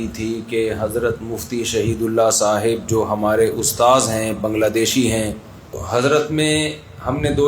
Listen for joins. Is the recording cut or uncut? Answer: cut